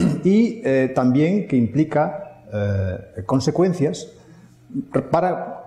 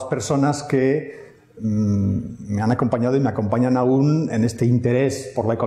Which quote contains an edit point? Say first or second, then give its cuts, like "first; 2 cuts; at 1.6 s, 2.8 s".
first; 1 cut; at 1.6 s